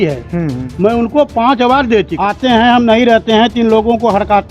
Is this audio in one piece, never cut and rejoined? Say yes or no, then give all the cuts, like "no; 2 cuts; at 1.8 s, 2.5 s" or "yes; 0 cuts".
no; 1 cut; at 2.1 s